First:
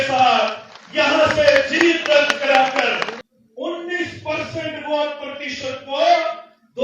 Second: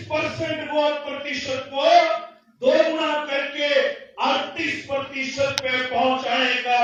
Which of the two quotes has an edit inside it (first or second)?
first